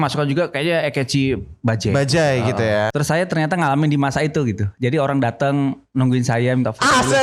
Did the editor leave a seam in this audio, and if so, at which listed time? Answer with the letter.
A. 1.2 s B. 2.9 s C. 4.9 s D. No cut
B